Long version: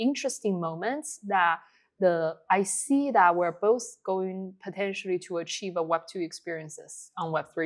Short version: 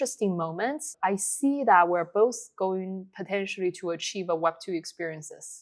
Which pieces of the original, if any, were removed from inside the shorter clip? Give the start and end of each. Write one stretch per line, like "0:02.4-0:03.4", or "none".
0:01.1-0:02.4